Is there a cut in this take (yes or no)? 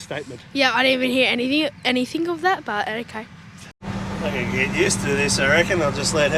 yes